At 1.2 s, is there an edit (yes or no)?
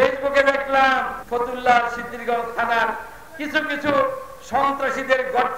yes